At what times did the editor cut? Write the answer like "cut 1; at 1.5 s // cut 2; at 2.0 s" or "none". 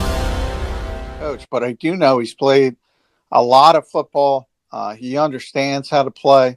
cut 1; at 1.4 s